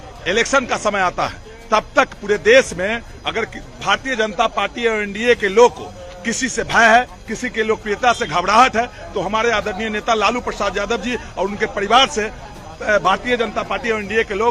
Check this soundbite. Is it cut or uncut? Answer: uncut